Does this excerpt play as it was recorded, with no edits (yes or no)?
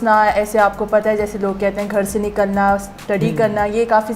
yes